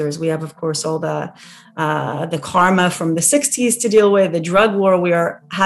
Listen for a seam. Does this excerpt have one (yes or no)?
no